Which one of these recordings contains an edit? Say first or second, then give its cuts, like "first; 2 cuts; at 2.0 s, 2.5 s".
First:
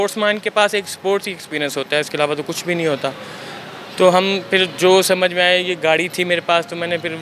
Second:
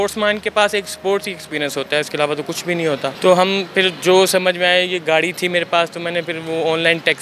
second; 1 cut; at 3.2 s